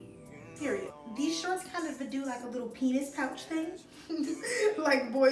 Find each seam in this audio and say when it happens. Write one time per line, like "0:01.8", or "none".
0:01.0